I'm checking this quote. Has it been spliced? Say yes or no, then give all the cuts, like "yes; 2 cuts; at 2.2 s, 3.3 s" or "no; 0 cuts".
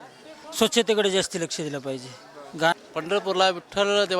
yes; 1 cut; at 2.8 s